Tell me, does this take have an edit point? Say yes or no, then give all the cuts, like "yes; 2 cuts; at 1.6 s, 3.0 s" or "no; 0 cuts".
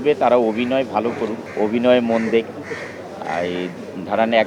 no; 0 cuts